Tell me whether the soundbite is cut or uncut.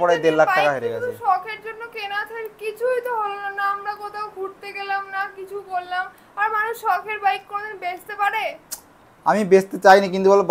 uncut